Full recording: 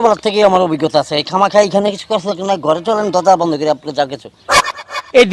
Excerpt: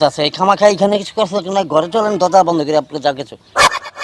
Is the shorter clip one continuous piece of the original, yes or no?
yes